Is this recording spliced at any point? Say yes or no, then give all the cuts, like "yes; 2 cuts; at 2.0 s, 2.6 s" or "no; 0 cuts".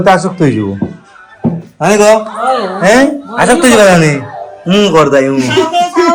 no; 0 cuts